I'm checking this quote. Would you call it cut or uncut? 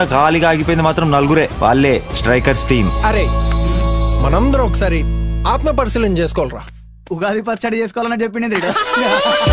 cut